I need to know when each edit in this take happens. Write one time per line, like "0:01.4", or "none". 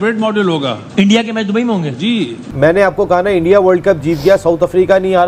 0:02.5

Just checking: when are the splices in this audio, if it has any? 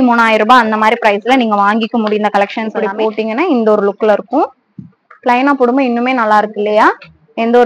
0:02.8

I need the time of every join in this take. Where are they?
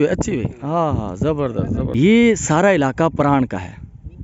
0:01.9

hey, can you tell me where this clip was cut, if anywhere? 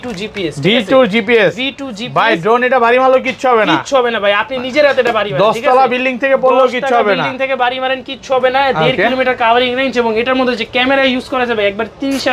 none

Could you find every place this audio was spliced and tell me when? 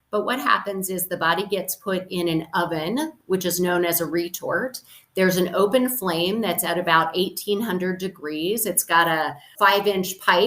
0:09.5

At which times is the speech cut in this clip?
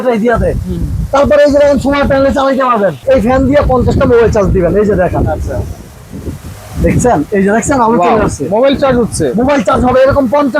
0:03.0

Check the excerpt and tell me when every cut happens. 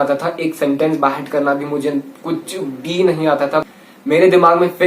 0:03.6

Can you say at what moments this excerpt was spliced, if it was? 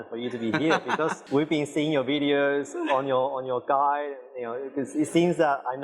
0:01.2

